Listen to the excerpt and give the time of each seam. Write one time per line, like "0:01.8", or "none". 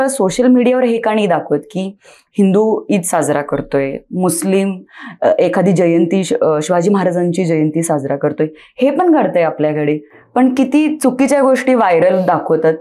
none